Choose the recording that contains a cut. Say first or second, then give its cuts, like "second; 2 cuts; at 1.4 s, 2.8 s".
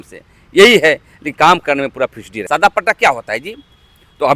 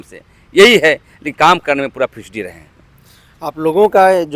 first; 1 cut; at 2.4 s